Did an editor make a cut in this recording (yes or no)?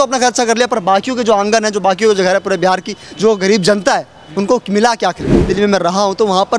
yes